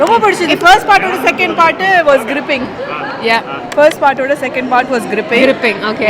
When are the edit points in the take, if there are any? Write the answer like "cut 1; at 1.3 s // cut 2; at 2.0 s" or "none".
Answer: none